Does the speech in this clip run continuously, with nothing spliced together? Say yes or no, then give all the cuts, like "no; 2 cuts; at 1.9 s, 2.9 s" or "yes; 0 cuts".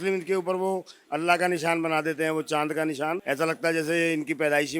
no; 1 cut; at 3.2 s